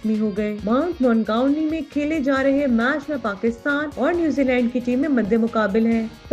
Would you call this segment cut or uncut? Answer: uncut